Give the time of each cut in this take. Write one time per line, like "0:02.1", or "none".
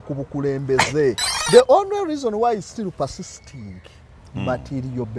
0:01.3